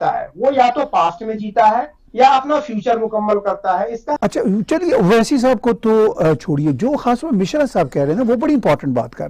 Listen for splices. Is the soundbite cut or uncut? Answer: cut